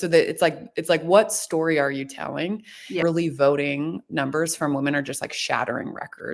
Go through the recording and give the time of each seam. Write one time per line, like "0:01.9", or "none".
0:03.0